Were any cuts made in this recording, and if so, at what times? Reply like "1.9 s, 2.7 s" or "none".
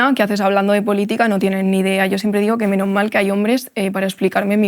none